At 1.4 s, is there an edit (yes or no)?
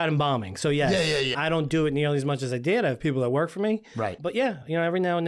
yes